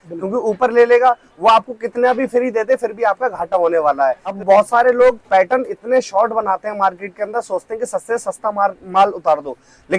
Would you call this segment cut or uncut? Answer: cut